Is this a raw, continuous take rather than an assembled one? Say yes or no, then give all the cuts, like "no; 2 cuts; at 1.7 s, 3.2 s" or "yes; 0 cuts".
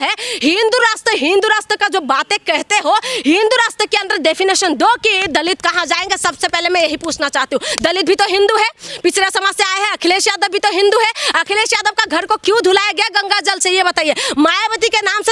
yes; 0 cuts